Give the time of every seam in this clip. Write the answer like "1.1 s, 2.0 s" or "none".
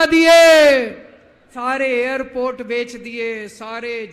1.5 s